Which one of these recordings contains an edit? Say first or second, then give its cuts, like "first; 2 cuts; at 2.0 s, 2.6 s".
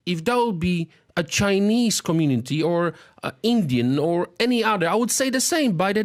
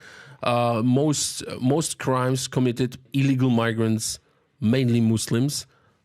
second; 1 cut; at 3.1 s